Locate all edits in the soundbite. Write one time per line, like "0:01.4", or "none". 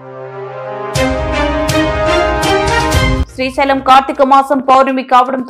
0:03.2